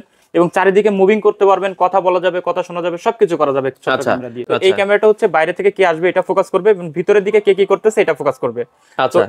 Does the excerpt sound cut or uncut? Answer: cut